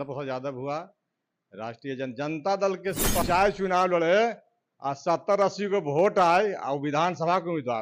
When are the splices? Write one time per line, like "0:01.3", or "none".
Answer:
0:03.2